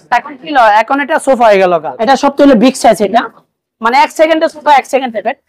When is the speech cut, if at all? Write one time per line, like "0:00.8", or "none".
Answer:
0:01.9